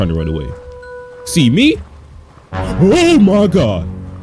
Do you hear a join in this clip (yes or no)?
no